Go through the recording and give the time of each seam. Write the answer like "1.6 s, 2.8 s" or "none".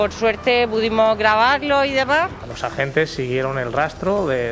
2.4 s